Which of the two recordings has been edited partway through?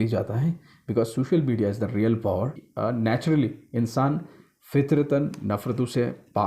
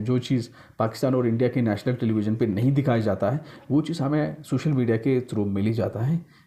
first; 1 cut; at 2.5 s

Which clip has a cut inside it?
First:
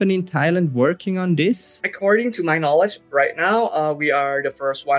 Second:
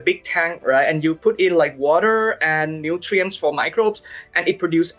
first; 2 cuts; at 1.8 s, 3.0 s

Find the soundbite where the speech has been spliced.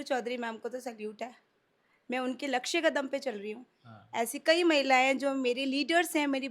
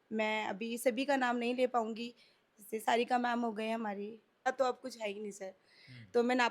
second; 1 cut; at 4.5 s

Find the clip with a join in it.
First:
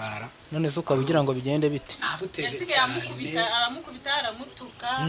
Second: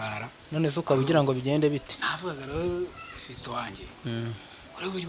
first; 1 cut; at 2.2 s

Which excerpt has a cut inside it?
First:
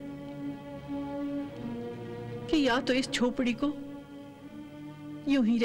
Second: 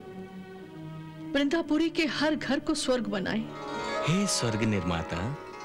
second; 1 cut; at 3.7 s

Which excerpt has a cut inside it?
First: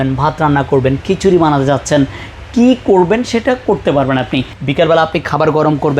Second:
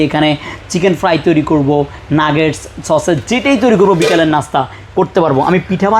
first; 1 cut; at 4.5 s

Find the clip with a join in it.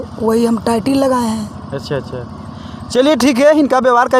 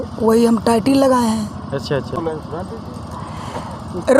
second; 1 cut; at 2.1 s

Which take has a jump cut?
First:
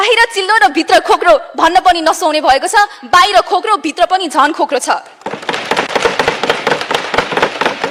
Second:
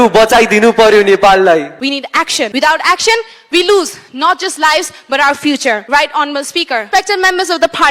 second; 3 cuts; at 2.1 s, 5.8 s, 6.9 s

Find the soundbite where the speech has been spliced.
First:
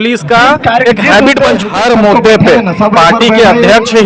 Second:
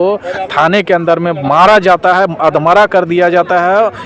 first; 1 cut; at 1.6 s

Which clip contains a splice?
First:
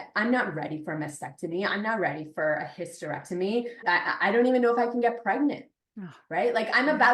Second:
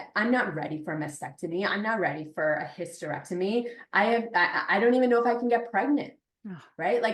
first; 1 cut; at 3.8 s

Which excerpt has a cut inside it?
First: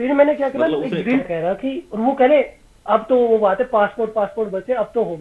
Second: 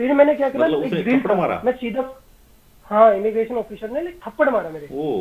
first; 1 cut; at 1.2 s

